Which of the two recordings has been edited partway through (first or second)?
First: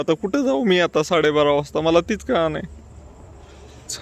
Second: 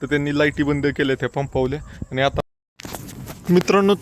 second